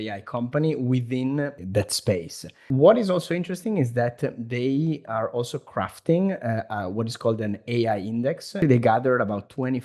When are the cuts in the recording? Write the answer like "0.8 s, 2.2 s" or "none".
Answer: 1.6 s, 2.6 s, 8.6 s